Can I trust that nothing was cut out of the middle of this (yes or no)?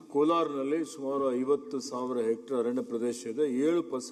yes